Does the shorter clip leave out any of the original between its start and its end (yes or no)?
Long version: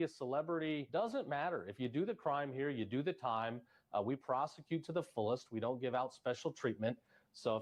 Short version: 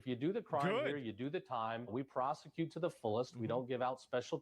yes